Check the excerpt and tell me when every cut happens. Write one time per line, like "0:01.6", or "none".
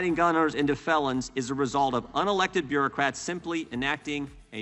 none